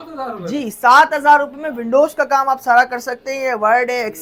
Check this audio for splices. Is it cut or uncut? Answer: uncut